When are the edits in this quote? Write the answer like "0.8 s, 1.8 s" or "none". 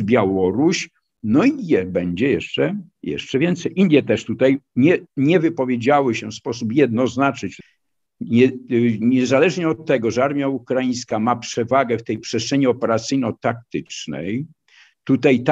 7.5 s